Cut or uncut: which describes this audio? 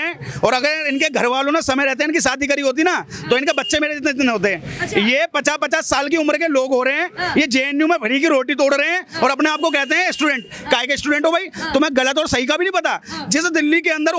uncut